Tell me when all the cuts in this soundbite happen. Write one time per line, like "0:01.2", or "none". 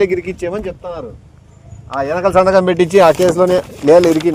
none